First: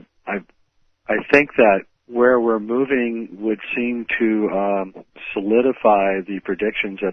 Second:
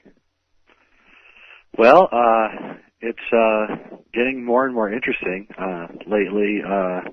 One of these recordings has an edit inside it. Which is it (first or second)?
second